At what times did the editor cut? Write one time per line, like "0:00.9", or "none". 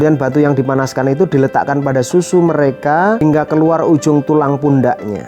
0:03.2